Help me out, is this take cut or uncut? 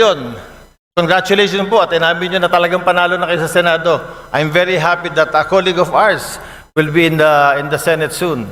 uncut